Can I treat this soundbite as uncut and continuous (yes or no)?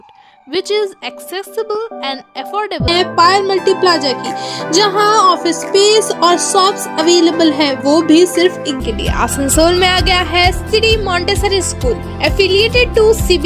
no